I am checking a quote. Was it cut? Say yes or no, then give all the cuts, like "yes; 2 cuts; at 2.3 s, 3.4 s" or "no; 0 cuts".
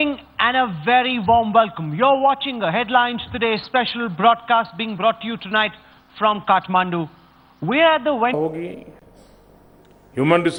no; 0 cuts